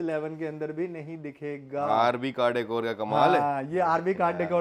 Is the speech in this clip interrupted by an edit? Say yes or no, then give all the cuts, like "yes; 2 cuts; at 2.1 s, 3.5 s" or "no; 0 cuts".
no; 0 cuts